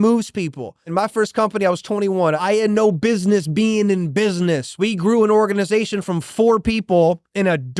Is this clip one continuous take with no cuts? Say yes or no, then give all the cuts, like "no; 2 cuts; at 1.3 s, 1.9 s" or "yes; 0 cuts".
no; 3 cuts; at 0.9 s, 2.4 s, 4.7 s